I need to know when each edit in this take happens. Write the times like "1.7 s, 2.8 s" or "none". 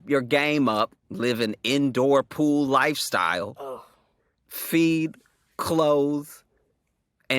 1.0 s